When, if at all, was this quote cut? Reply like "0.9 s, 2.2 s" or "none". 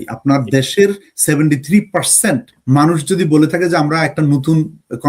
2.5 s